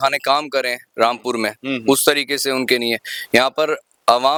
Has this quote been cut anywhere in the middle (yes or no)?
no